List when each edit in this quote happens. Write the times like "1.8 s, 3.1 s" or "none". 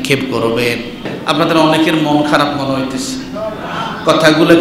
1.1 s